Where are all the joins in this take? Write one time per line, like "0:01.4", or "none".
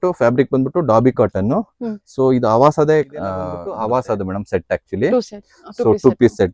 0:03.6